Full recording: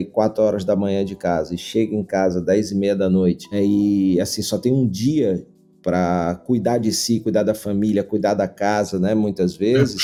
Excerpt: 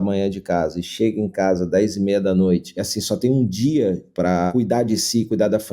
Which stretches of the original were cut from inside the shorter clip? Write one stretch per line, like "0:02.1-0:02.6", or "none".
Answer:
0:03.5-0:04.2
0:05.8-0:06.4